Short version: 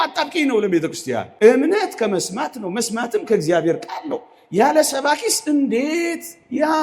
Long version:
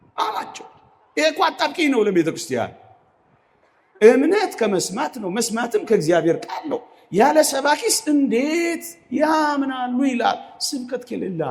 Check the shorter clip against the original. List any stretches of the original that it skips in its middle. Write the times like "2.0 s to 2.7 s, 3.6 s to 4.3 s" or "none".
2.7 s to 3.9 s